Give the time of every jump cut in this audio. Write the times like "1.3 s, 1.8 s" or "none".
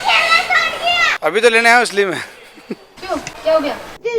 2.9 s